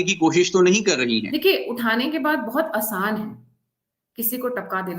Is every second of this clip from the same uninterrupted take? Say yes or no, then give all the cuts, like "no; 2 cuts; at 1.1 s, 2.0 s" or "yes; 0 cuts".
no; 1 cut; at 1.3 s